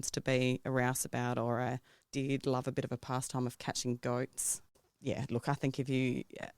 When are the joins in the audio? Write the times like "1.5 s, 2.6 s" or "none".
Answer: 4.9 s